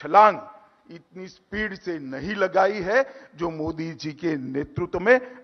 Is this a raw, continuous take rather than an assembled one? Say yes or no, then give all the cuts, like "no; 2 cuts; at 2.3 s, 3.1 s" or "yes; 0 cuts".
yes; 0 cuts